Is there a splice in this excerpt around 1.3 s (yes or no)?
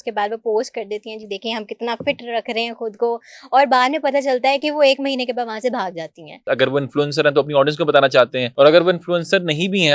no